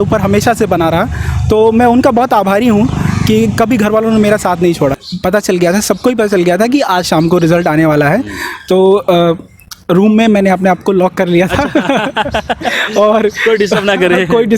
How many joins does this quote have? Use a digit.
1